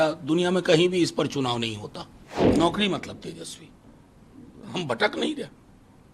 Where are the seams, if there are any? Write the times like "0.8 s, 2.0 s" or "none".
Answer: 2.5 s